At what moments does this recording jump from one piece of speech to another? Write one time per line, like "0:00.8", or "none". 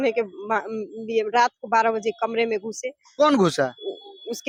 none